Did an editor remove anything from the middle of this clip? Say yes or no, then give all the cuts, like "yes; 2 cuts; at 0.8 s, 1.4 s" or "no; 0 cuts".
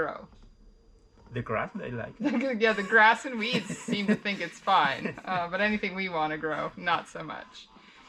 no; 0 cuts